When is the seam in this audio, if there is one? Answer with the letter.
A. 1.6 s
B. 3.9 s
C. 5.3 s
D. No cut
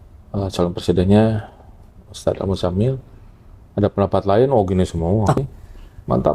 C